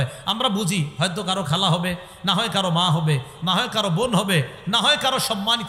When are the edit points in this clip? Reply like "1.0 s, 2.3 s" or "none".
none